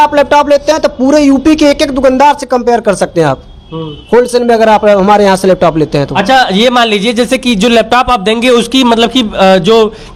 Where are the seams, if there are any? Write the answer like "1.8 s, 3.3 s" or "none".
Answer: none